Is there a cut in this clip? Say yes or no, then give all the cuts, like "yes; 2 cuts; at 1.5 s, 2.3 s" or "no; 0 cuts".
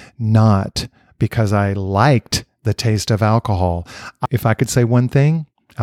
yes; 1 cut; at 4.2 s